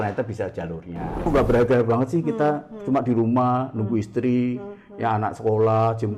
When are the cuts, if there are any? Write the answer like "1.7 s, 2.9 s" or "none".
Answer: 1.2 s